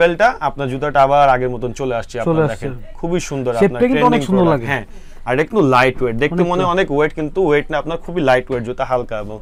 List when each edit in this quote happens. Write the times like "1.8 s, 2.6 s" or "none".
none